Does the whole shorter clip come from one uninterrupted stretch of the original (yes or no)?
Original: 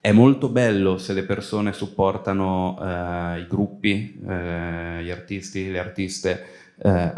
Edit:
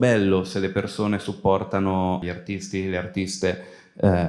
no